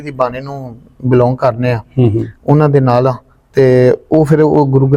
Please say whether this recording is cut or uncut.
uncut